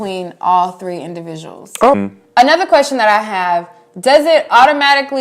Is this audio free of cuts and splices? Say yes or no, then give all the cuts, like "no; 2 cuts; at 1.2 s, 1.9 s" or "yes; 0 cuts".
no; 1 cut; at 1.9 s